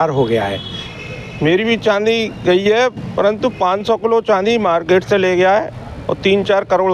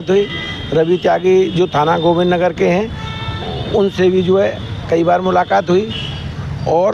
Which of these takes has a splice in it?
first; 1 cut; at 0.9 s

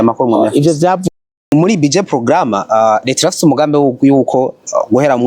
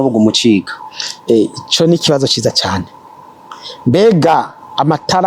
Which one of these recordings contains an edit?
first; 1 cut; at 1.4 s

